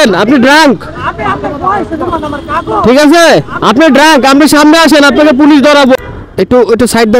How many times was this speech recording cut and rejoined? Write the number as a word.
one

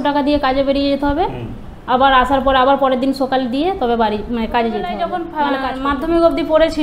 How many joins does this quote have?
one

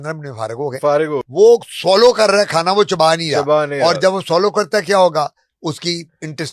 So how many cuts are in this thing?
one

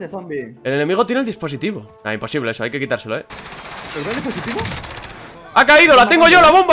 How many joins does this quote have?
two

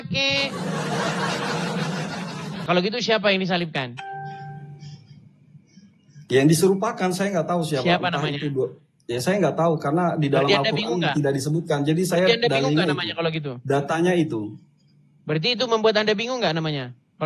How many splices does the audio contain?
one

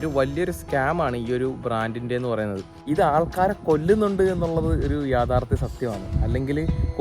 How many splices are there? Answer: one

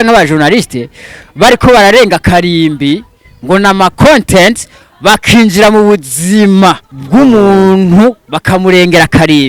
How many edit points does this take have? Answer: two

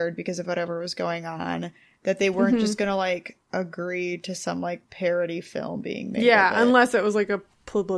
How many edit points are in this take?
two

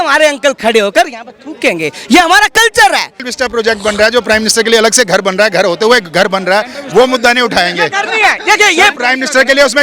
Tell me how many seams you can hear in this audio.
one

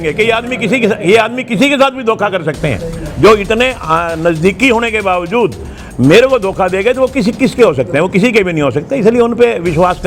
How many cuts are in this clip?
zero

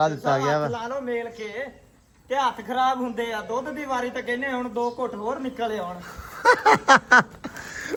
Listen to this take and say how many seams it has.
zero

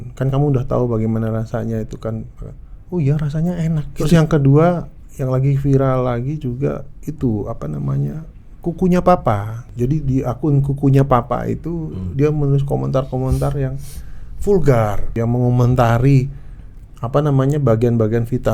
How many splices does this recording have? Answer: three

